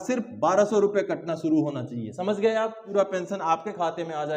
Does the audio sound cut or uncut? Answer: cut